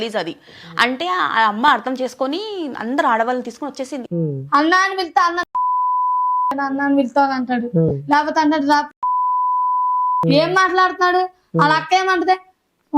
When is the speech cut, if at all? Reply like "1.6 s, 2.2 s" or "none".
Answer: 4.0 s

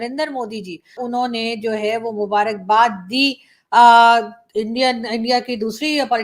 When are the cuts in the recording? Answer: 1.0 s

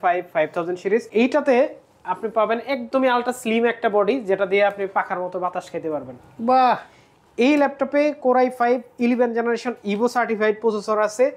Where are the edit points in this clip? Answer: 1.1 s

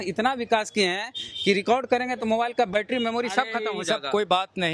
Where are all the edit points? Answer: none

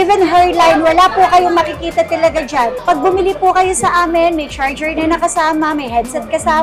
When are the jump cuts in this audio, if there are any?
2.8 s

